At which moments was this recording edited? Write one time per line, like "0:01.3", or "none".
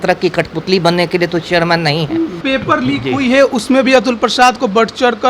0:02.4